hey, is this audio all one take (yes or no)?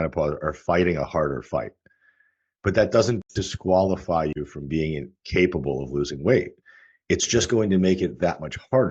yes